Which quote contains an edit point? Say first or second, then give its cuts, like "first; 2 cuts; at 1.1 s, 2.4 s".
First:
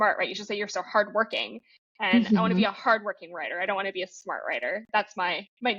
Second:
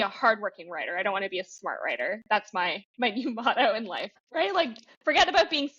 second; 1 cut; at 4.3 s